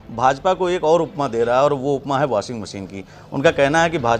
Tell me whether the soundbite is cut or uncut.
uncut